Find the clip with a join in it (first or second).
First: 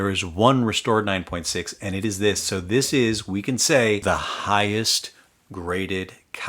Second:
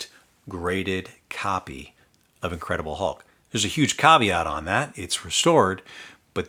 first